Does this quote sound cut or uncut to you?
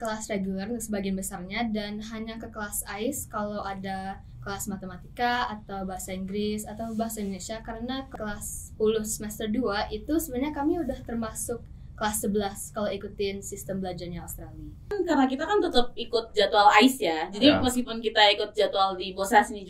cut